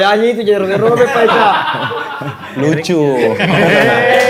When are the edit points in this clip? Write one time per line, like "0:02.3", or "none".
none